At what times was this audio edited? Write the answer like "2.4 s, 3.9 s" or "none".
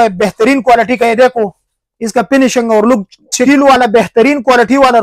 3.4 s